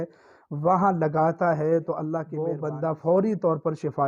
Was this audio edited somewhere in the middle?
yes; 1 cut; at 2.6 s

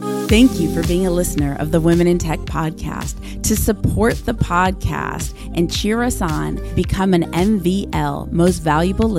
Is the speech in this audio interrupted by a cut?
no; 0 cuts

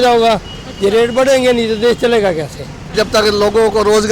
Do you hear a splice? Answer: yes; 1 cut; at 2.9 s

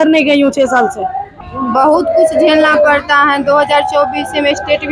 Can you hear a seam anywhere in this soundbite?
yes; 1 cut; at 1.3 s

